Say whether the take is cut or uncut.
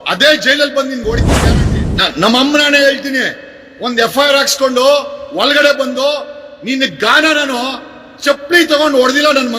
cut